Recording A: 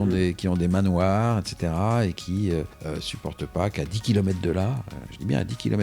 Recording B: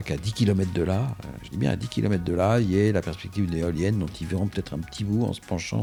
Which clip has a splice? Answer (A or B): A